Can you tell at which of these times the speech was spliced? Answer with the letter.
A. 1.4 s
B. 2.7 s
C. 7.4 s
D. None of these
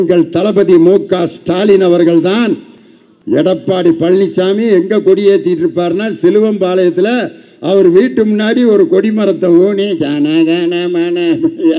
D